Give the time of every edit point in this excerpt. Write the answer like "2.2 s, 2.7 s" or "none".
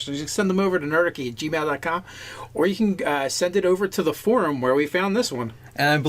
2.8 s